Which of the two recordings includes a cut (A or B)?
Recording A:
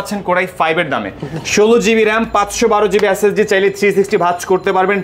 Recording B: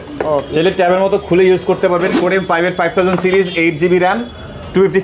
B